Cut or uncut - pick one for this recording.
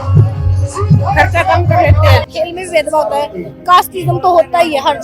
cut